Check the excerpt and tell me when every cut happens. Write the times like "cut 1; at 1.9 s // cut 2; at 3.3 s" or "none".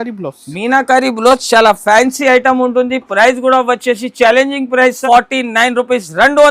cut 1; at 5.0 s